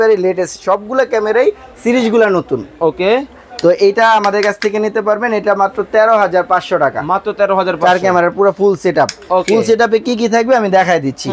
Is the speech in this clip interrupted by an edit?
no; 0 cuts

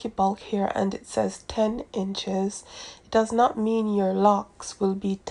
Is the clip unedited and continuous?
yes; 0 cuts

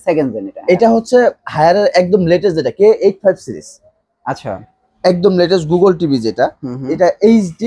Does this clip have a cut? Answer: no; 0 cuts

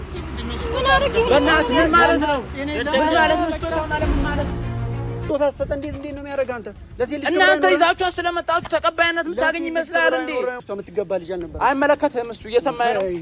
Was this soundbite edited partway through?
yes; 2 cuts; at 5.2 s, 10.6 s

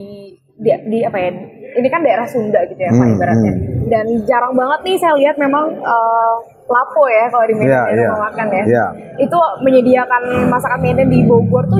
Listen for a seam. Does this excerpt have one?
no; 0 cuts

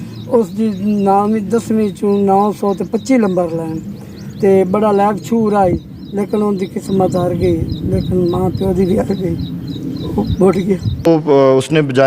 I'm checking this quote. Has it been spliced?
yes; 1 cut; at 11.1 s

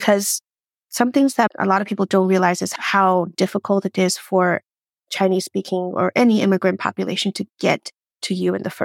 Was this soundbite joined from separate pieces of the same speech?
yes; 1 cut; at 2.7 s

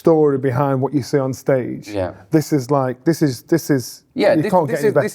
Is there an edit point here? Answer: no; 0 cuts

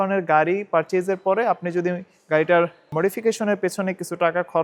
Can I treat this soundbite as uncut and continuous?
no; 1 cut; at 2.8 s

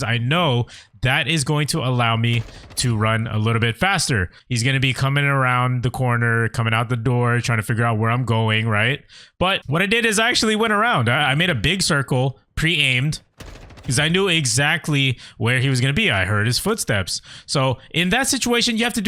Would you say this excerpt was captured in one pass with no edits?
no; 2 cuts; at 4.4 s, 9.6 s

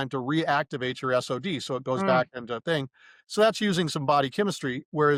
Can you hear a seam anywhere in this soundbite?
no; 0 cuts

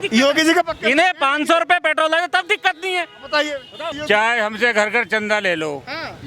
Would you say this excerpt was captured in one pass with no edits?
no; 1 cut; at 4.0 s

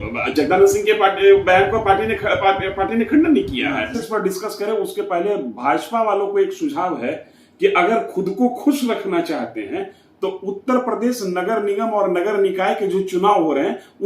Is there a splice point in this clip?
yes; 1 cut; at 4.0 s

